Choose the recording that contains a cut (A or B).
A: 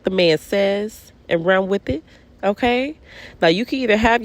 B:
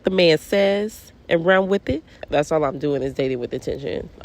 B